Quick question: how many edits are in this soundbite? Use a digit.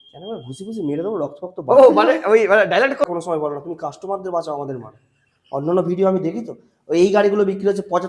1